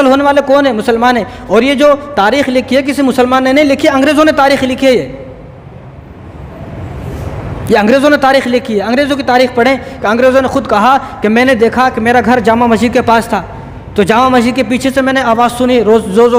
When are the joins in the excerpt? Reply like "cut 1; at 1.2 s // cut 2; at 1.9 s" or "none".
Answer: none